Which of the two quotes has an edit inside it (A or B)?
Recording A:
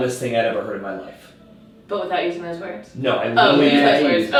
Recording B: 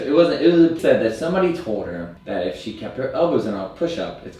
B